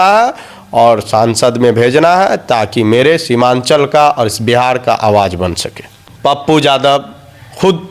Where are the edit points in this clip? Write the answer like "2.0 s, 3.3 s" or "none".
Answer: 5.9 s

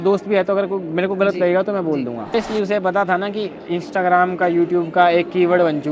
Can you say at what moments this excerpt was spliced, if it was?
2.3 s

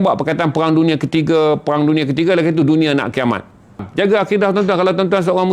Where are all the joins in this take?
3.9 s

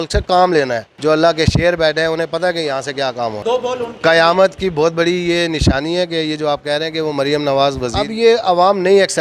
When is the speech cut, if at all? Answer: 1.0 s, 3.4 s, 7.8 s

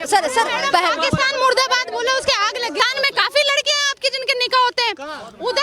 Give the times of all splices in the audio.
2.8 s

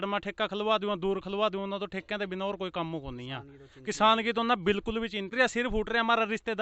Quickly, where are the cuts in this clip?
5.3 s

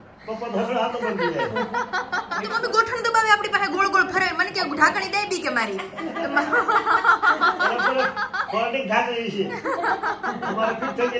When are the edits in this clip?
2.5 s

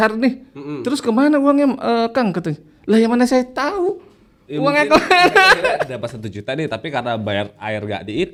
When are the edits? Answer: none

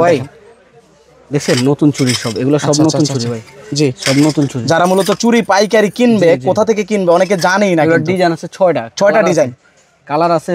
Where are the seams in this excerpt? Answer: none

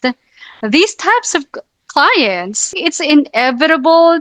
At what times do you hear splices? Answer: 2.7 s

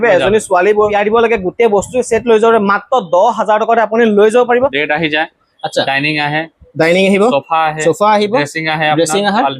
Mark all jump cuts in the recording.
0.9 s, 4.8 s

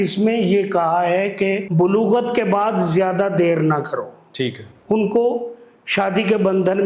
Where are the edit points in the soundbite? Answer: 1.6 s

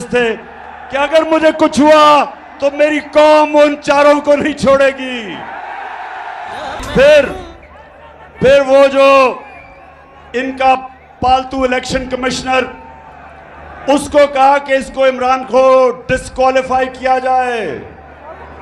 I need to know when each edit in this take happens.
none

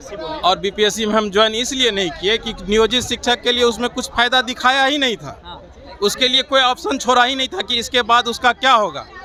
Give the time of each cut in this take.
none

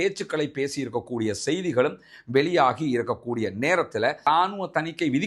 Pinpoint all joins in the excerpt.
4.2 s

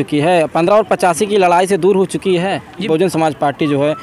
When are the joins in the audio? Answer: 2.9 s

